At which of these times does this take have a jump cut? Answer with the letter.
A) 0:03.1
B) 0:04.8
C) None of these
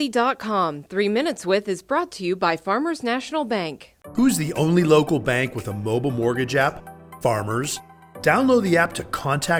C